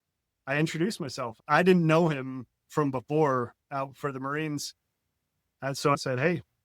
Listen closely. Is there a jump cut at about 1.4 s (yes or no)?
yes